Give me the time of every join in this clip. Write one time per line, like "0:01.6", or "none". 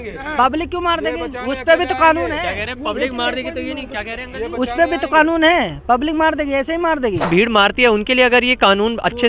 0:07.3